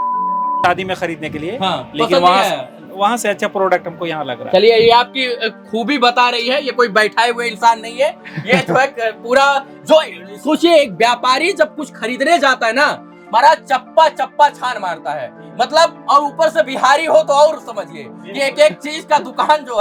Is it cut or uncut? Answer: uncut